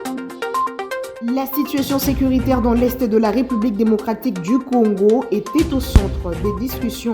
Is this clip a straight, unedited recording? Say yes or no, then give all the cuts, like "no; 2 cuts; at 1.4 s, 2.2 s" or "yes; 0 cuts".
no; 1 cut; at 1.1 s